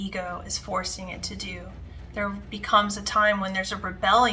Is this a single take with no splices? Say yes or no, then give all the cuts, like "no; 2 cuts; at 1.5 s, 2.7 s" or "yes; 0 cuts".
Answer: yes; 0 cuts